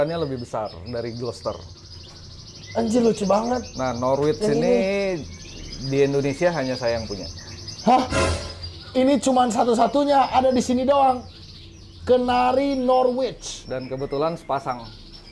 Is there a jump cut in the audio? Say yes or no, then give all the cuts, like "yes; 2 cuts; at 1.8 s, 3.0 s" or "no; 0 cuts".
no; 0 cuts